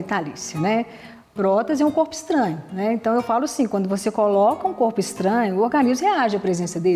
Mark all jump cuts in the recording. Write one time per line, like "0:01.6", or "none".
none